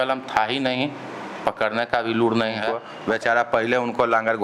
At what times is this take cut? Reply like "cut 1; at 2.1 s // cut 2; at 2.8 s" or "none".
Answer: cut 1; at 2.9 s